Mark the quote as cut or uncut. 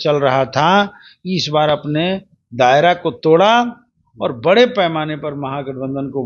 uncut